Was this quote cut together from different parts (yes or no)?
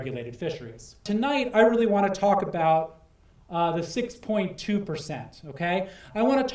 yes